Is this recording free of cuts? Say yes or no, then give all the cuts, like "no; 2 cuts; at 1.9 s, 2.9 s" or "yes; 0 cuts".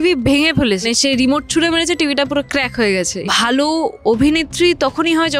no; 2 cuts; at 0.8 s, 3.1 s